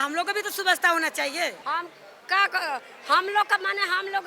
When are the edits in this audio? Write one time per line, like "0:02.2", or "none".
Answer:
0:01.6